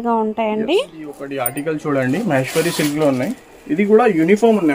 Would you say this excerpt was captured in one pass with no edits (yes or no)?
no